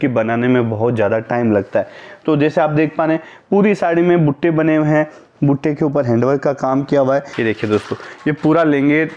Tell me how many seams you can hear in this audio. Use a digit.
1